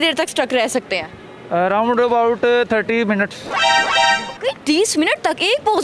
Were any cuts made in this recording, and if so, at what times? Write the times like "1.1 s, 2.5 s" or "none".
none